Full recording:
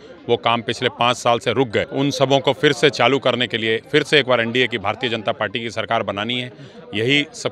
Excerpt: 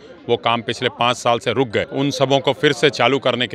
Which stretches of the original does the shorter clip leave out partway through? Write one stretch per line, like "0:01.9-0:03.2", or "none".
none